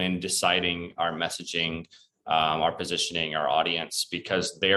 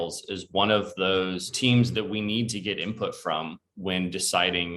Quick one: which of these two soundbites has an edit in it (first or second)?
second